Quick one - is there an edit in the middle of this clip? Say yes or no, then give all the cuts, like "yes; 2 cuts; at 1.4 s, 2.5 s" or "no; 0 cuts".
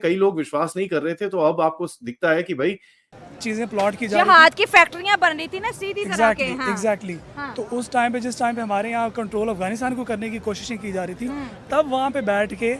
yes; 1 cut; at 3.2 s